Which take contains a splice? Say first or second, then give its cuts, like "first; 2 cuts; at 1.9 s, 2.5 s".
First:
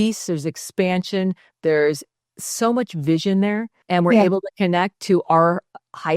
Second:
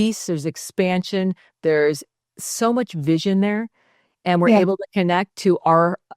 first; 1 cut; at 3.7 s